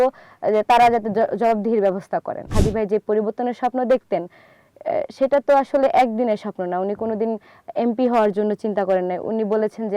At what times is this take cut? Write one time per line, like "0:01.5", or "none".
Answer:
0:02.5